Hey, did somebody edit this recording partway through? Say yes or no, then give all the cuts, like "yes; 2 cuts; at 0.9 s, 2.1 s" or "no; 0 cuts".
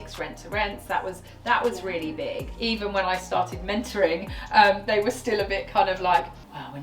yes; 1 cut; at 2.5 s